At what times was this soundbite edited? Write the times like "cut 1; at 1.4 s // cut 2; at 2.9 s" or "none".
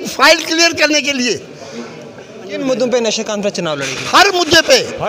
cut 1; at 2.5 s